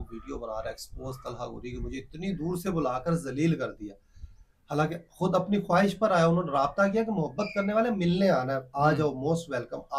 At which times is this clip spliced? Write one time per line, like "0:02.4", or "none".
none